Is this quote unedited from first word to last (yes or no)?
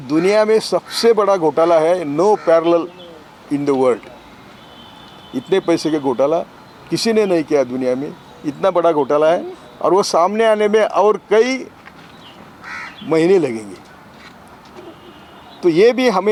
yes